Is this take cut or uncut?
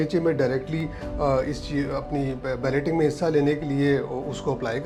uncut